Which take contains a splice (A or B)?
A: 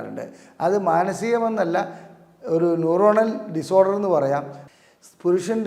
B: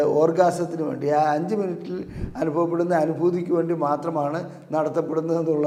A